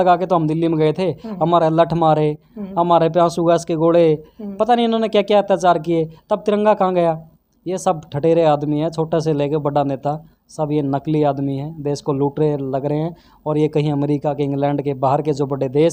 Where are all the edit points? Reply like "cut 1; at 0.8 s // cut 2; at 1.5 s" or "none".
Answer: none